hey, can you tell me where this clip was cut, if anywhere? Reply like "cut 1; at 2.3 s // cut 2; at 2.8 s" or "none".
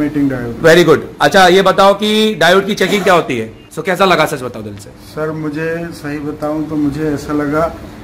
cut 1; at 3.6 s